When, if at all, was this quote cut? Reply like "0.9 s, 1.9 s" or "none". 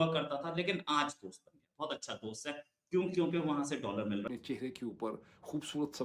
4.2 s